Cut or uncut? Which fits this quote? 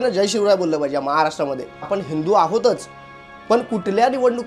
cut